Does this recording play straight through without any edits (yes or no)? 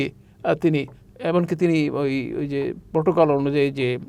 yes